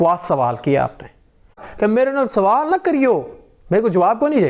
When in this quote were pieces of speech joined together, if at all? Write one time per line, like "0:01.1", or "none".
0:01.7